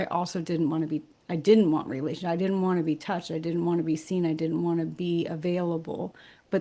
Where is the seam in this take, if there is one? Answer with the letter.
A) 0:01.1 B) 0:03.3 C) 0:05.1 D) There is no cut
D